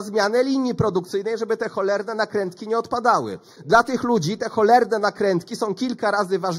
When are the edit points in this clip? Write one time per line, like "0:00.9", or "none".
0:03.5